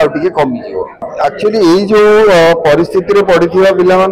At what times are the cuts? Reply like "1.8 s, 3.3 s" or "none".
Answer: 1.0 s